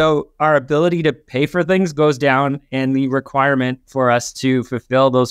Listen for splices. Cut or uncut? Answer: uncut